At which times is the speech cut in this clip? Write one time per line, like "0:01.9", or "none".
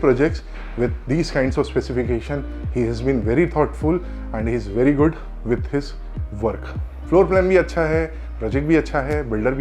none

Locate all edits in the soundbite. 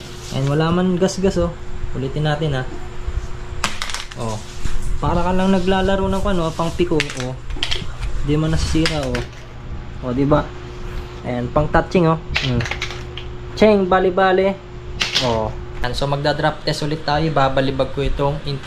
0:15.9

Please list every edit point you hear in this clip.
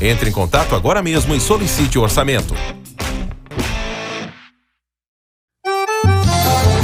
none

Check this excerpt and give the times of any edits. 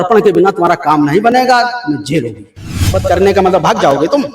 0:02.9

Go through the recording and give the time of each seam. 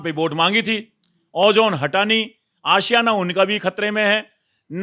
none

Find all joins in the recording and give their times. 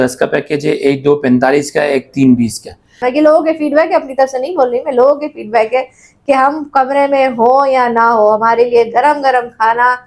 0:03.0

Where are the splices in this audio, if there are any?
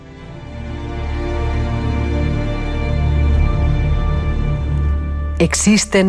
0:02.3

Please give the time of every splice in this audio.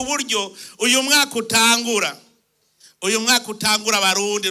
none

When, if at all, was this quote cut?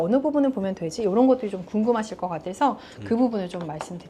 none

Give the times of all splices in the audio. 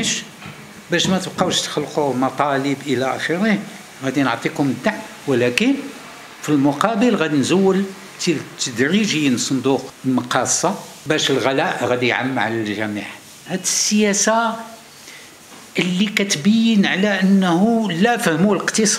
0:09.9
0:10.9
0:13.4

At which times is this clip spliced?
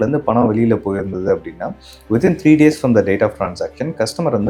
none

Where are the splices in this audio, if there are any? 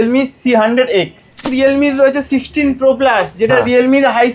0:01.5

